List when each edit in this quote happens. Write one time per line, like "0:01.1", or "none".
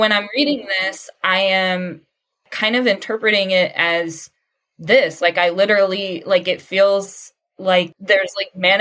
0:07.9

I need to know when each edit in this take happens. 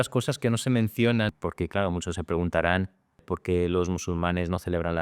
0:01.3

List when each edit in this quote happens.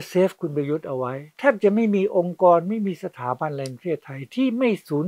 0:01.2

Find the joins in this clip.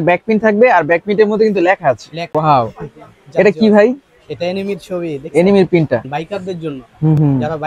0:02.3
0:06.1

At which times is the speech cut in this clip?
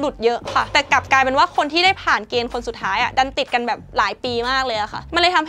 none

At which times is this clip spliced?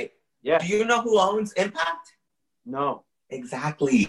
0:03.1

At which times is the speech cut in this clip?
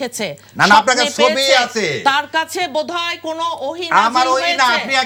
none

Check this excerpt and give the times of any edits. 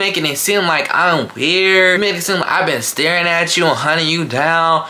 0:02.0

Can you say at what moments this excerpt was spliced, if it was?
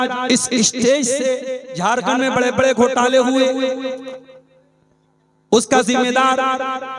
0:01.6

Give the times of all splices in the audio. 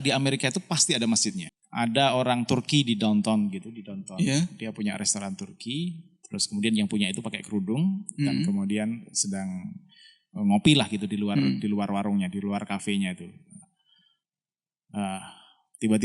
0:01.4

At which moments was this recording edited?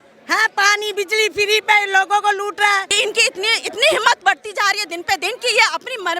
0:02.9

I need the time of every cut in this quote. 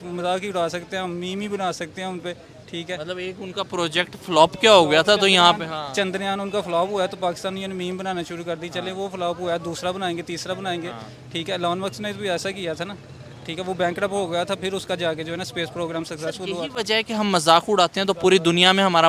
none

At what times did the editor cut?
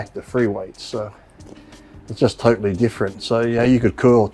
none

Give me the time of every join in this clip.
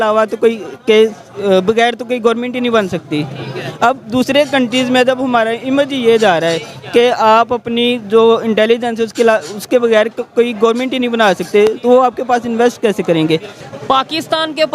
0:13.6

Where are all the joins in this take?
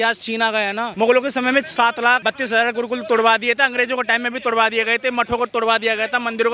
0:00.8
0:02.2

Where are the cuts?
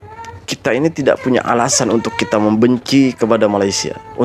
none

